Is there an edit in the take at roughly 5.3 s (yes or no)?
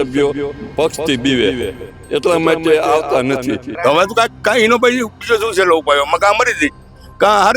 no